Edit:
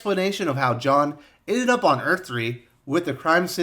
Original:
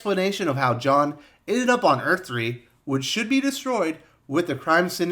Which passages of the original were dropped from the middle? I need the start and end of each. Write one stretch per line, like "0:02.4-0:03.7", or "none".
0:02.7-0:04.1